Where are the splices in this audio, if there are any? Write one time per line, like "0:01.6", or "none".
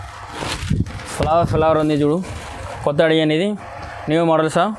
none